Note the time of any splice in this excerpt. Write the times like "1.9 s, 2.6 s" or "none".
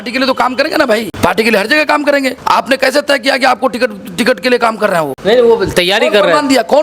1.1 s, 2.4 s, 5.1 s